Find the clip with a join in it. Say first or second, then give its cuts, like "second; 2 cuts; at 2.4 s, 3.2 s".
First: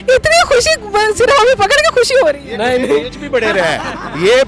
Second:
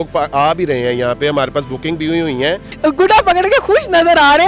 second; 1 cut; at 2.7 s